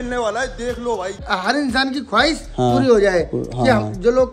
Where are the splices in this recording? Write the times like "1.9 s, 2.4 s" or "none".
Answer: 1.2 s